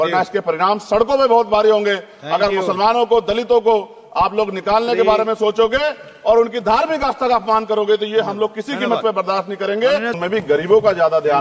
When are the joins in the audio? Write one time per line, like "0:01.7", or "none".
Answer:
0:10.2